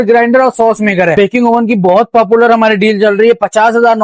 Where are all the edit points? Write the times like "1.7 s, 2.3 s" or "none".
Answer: 1.1 s